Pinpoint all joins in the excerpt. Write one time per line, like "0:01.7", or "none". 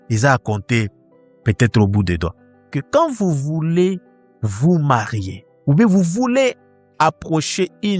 0:02.7